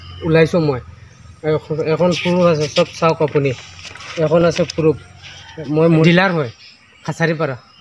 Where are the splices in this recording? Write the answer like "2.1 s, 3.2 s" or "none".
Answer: 6.0 s